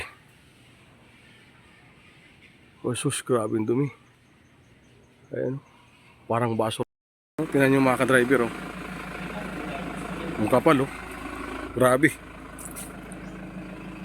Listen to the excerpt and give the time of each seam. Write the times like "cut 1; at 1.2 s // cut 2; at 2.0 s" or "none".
cut 1; at 6.8 s

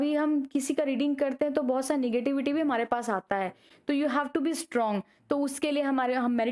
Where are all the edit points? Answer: none

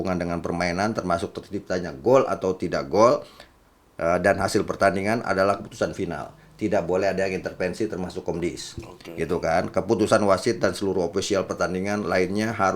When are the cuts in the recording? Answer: none

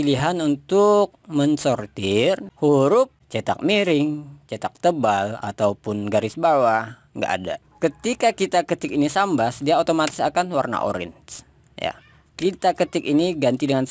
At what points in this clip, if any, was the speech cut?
cut 1; at 2.5 s // cut 2; at 3.3 s // cut 3; at 7.6 s

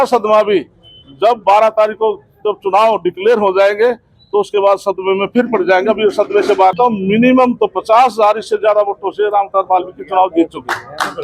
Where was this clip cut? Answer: cut 1; at 6.7 s

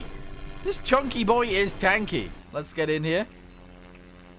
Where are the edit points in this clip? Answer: cut 1; at 2.4 s

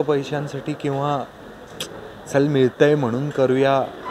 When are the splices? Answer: none

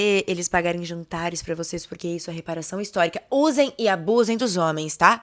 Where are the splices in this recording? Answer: none

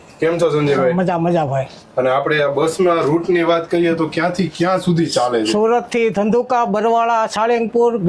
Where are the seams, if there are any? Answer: none

